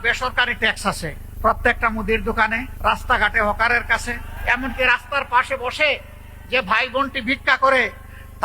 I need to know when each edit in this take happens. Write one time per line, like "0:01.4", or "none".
0:01.2
0:02.7
0:04.3